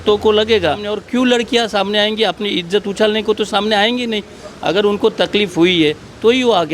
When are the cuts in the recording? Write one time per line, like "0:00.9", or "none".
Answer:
0:00.9